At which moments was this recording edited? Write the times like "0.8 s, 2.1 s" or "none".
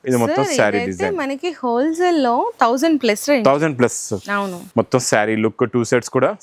4.7 s

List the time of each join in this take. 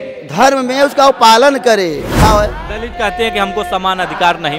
2.2 s

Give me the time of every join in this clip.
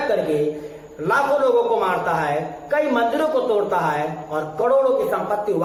none

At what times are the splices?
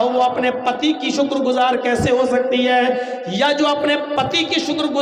none

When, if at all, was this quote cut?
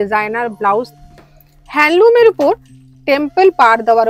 0.9 s

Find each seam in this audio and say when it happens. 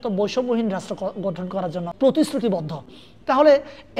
none

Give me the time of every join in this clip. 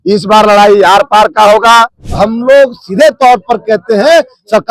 2.0 s

